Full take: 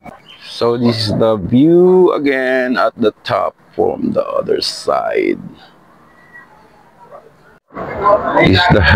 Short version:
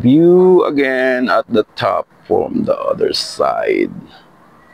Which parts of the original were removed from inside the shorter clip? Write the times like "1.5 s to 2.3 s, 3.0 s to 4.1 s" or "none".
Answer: none